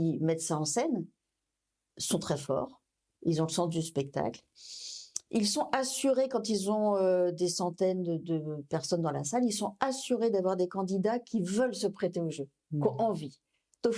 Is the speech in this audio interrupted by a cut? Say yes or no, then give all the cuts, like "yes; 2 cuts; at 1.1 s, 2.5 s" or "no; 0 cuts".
no; 0 cuts